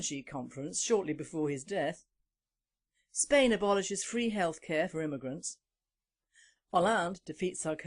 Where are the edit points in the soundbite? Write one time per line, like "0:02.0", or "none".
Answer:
0:03.2